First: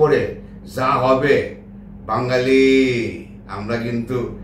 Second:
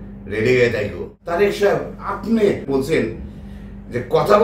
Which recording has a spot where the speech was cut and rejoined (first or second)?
second